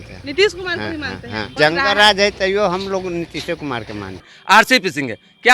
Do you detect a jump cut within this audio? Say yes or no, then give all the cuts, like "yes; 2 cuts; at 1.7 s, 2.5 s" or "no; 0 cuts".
yes; 2 cuts; at 1.5 s, 4.3 s